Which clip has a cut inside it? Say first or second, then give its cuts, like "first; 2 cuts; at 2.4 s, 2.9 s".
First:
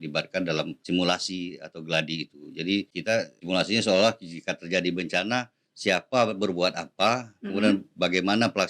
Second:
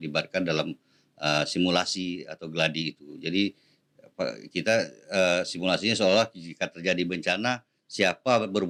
first; 2 cuts; at 0.8 s, 3.4 s